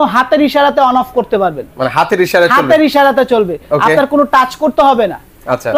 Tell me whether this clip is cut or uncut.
uncut